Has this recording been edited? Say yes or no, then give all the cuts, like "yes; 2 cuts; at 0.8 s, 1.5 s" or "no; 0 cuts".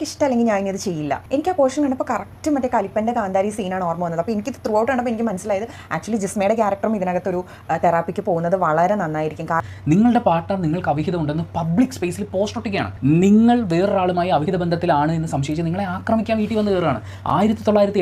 no; 0 cuts